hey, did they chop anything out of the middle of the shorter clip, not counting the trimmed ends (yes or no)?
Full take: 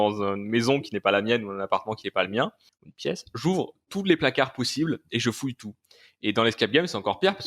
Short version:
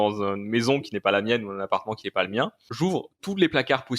yes